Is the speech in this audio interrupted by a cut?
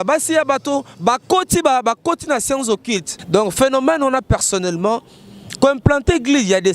yes; 1 cut; at 3.1 s

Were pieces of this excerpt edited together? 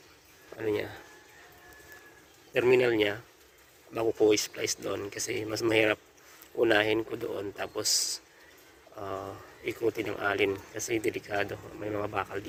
no; 0 cuts

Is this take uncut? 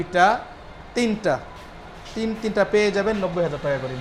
yes; 0 cuts

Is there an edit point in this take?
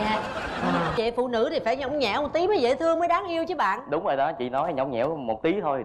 yes; 1 cut; at 1.0 s

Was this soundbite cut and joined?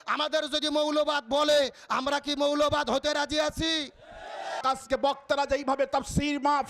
yes; 1 cut; at 4.6 s

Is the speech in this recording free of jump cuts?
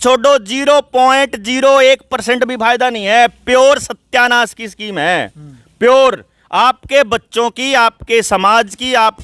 yes; 0 cuts

